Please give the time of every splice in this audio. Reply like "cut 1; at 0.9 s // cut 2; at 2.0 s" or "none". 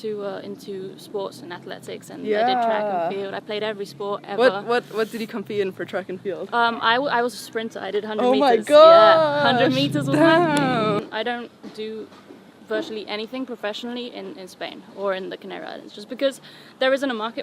cut 1; at 11.0 s